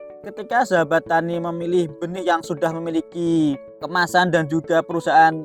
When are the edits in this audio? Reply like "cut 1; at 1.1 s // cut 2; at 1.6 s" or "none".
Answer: none